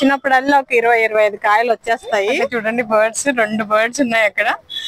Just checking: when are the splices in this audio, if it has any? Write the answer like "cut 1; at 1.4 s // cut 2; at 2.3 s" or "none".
cut 1; at 2.5 s